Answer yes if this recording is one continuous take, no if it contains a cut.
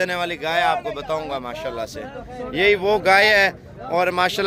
yes